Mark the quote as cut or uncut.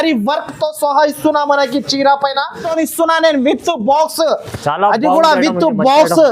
cut